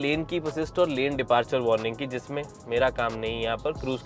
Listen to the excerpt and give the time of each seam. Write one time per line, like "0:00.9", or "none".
none